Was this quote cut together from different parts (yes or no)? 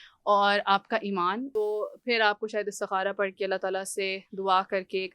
yes